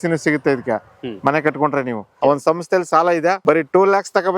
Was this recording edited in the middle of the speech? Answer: yes; 2 cuts; at 2.1 s, 3.4 s

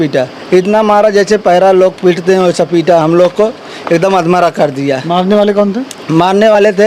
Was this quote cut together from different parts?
no; 0 cuts

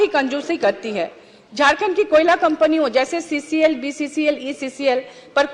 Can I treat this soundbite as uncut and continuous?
yes; 0 cuts

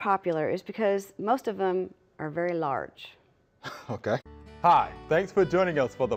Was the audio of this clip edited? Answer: no; 0 cuts

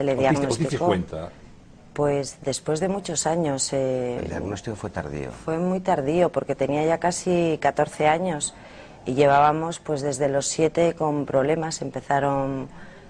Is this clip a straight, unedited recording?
yes; 0 cuts

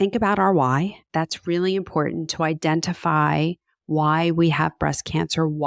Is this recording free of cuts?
no; 1 cut; at 1.0 s

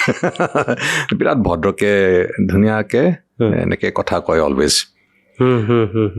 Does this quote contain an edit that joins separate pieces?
no; 0 cuts

